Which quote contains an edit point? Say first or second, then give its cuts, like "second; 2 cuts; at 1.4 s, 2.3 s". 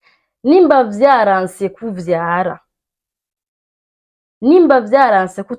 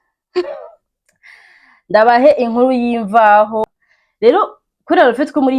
second; 1 cut; at 3.8 s